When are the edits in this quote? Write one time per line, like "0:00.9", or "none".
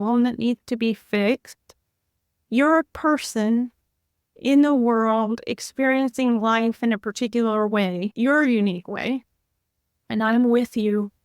0:08.1